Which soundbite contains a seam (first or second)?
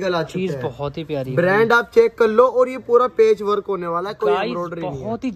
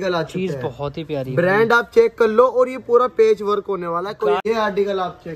second